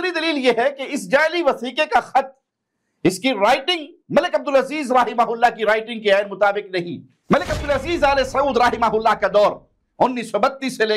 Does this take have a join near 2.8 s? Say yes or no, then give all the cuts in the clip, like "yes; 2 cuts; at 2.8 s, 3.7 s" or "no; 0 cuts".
no; 1 cut; at 7.2 s